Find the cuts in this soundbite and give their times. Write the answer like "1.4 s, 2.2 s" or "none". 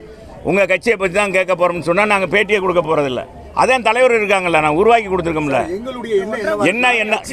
none